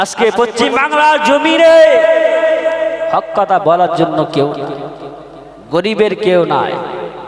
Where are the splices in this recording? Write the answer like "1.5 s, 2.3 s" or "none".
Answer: none